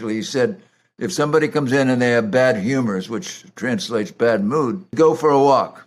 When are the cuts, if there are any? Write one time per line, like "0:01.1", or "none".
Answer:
0:04.9

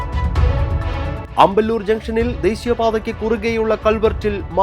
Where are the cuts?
0:01.2

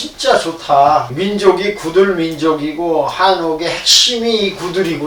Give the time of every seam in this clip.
0:01.1

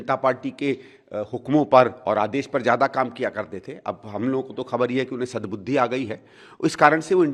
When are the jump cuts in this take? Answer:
none

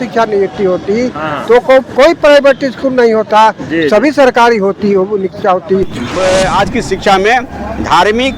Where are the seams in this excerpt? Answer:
0:06.0

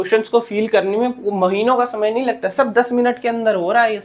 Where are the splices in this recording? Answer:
none

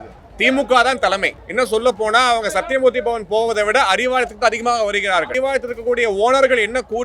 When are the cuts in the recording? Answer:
0:05.3

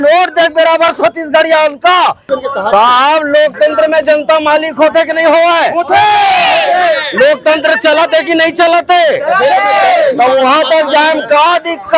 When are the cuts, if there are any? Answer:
0:02.2

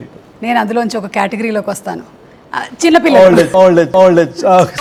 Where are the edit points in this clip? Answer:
none

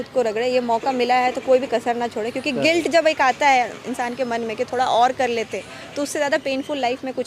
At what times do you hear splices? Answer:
none

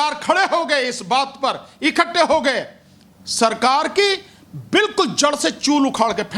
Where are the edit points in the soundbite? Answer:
none

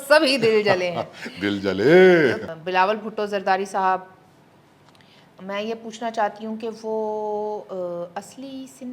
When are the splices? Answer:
0:02.4

